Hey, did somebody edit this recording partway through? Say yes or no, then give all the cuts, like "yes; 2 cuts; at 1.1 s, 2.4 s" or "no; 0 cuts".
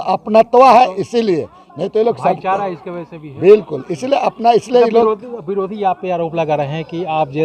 no; 0 cuts